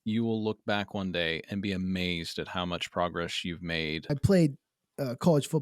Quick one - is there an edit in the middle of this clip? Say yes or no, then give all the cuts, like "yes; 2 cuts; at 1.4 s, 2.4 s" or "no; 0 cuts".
yes; 1 cut; at 4.1 s